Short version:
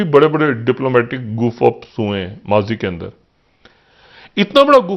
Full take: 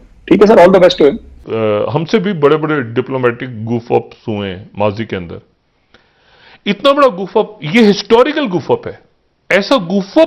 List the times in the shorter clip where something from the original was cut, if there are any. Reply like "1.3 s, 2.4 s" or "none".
none